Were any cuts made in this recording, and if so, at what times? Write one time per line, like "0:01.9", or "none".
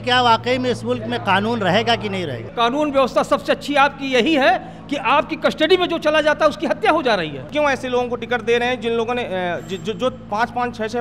0:02.4
0:07.5